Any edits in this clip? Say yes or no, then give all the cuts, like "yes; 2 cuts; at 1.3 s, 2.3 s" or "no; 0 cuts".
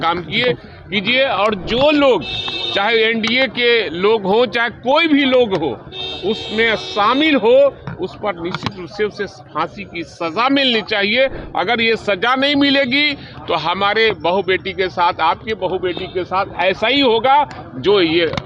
no; 0 cuts